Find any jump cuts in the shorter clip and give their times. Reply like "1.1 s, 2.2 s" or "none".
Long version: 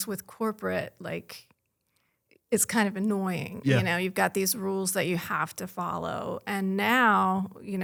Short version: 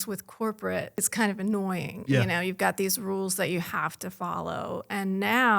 1.0 s